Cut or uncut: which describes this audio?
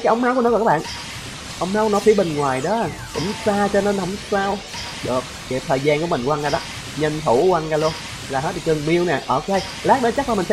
cut